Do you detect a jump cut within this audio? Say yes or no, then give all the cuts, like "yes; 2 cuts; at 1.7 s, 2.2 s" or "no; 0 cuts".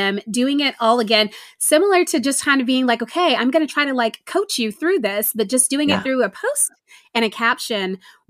no; 0 cuts